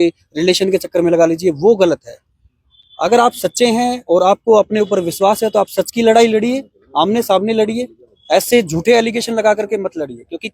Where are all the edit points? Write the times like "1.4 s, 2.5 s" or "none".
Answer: none